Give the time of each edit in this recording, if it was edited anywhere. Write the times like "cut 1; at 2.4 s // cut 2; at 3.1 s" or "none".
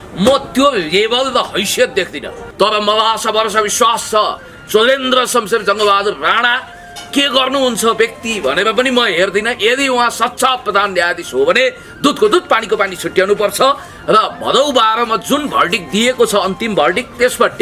cut 1; at 2.4 s